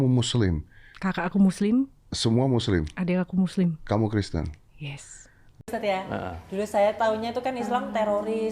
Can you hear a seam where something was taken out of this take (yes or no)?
yes